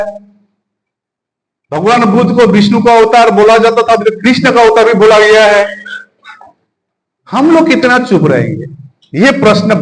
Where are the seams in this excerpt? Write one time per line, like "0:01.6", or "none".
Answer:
none